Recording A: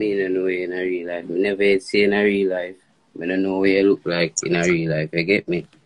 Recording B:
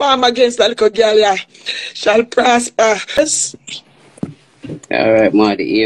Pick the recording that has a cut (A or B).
B